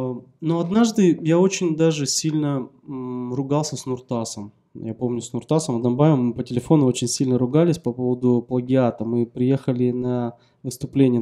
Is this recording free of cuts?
yes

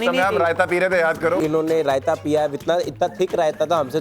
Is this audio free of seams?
no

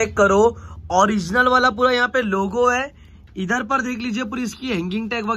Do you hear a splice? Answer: no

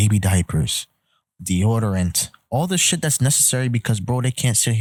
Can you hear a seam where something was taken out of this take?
no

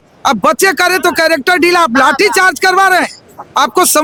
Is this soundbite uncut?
yes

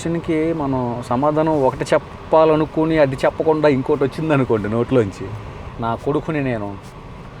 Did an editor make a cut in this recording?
yes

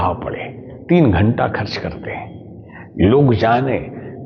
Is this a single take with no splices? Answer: yes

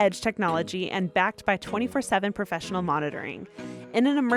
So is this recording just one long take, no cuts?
yes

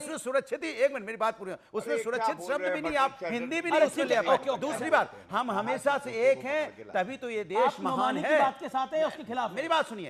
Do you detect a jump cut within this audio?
no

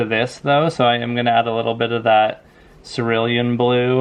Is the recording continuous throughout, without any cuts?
yes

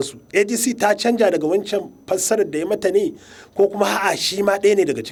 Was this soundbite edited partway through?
no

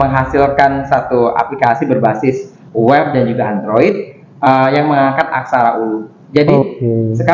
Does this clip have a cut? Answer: no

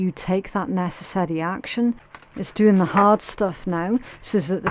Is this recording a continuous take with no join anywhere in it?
no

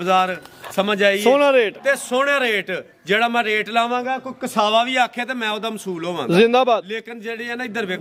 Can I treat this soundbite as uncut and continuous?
yes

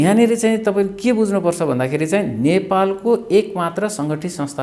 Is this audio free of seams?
yes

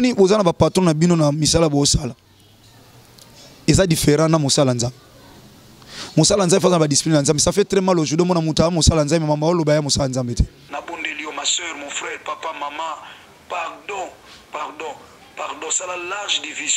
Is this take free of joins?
no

